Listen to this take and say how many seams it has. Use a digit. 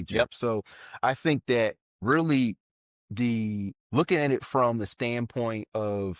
2